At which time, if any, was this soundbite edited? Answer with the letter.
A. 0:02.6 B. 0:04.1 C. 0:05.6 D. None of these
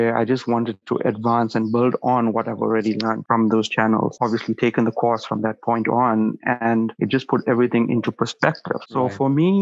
D